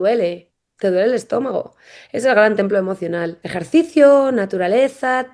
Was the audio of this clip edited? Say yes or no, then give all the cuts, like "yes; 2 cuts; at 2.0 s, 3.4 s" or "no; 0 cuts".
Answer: yes; 1 cut; at 3.4 s